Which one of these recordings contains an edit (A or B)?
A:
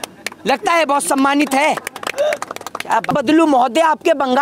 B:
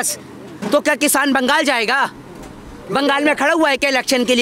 A